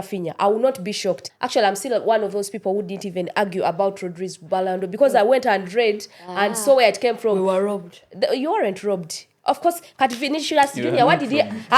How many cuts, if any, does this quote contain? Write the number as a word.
one